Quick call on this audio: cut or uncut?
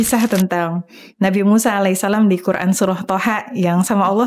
uncut